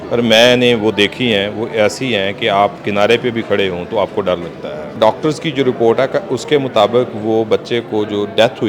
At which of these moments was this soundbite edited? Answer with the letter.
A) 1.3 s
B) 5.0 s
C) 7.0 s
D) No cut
B